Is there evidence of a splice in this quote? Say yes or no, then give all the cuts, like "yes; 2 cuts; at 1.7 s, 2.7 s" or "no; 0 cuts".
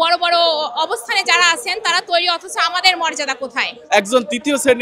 yes; 1 cut; at 3.7 s